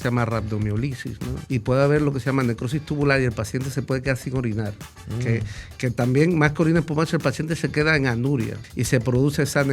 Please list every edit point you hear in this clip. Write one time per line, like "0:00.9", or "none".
0:01.3
0:08.6